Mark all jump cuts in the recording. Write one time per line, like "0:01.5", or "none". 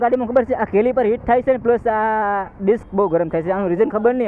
none